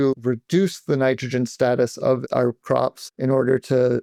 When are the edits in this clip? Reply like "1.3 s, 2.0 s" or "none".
none